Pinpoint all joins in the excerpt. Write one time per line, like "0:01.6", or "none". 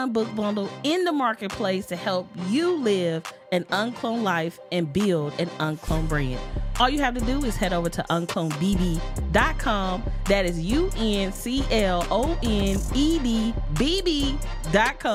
none